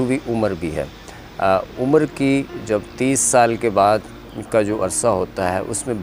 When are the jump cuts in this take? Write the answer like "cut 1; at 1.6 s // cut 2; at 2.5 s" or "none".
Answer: none